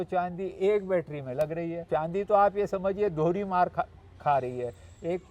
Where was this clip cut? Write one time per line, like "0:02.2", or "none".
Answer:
0:01.9